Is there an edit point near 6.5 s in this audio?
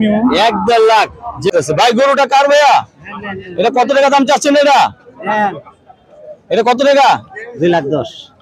no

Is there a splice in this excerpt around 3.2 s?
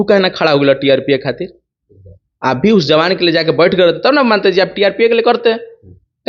no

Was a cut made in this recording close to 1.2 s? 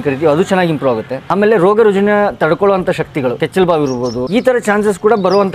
yes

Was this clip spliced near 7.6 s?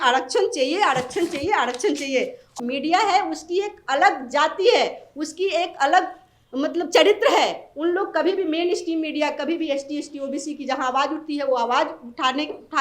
no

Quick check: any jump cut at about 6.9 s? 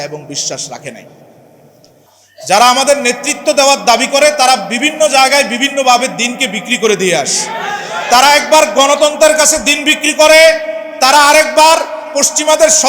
no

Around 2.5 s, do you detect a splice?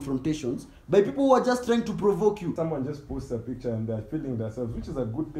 yes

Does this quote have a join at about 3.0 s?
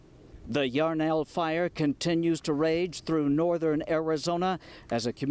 yes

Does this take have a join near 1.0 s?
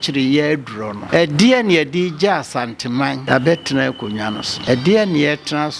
yes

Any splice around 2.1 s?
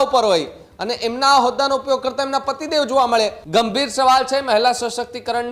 no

